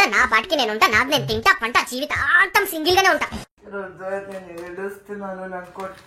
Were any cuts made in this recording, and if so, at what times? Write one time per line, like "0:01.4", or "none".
0:03.6